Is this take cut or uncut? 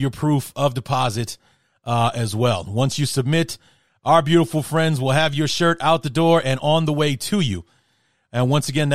uncut